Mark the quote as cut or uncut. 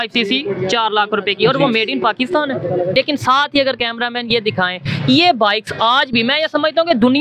cut